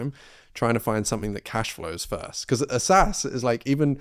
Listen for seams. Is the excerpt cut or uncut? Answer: uncut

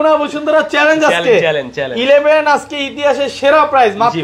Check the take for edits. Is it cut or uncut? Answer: uncut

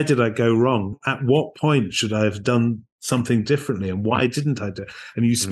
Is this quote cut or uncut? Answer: uncut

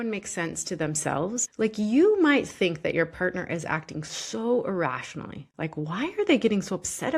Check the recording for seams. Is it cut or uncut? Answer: cut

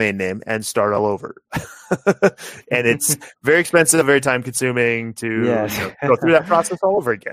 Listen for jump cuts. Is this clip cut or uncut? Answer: uncut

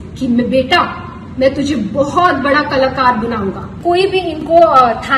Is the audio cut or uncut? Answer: cut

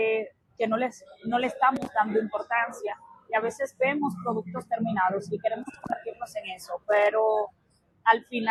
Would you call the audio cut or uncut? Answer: uncut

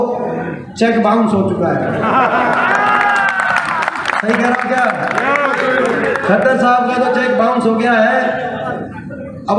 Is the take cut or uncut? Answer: uncut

